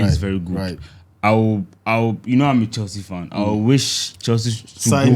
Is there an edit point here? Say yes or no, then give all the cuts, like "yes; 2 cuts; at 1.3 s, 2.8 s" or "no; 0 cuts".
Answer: no; 0 cuts